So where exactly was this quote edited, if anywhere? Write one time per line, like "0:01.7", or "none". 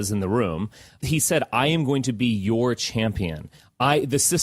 0:01.0